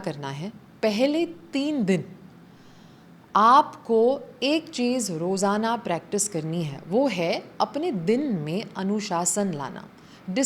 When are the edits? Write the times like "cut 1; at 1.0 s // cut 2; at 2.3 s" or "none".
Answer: none